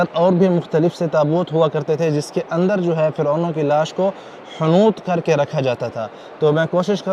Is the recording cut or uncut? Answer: uncut